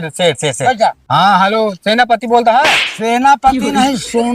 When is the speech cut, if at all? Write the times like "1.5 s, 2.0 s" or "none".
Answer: 1.0 s